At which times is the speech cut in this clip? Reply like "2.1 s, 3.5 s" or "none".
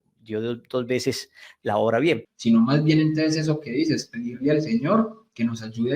2.3 s

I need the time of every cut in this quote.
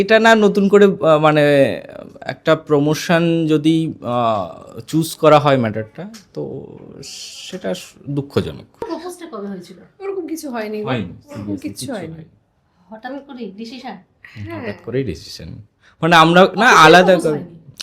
8.8 s

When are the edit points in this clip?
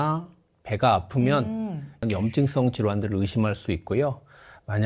2.0 s

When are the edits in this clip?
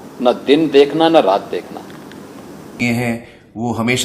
2.8 s

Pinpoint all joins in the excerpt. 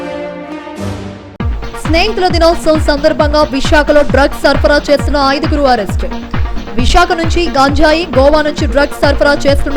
none

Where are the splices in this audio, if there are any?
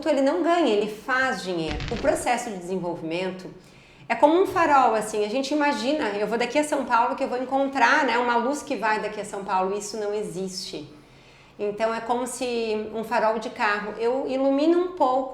1.9 s

